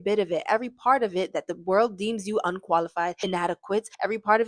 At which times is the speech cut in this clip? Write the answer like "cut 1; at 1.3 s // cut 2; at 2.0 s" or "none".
cut 1; at 3.4 s